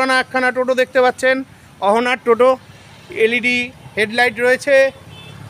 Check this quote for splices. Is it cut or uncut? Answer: uncut